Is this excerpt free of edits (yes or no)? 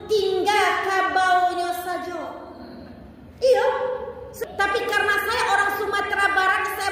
no